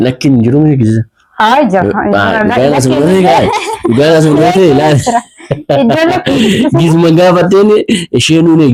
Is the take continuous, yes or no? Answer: yes